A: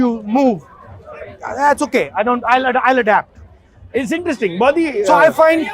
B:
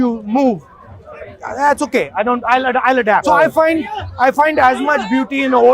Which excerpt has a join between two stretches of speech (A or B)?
B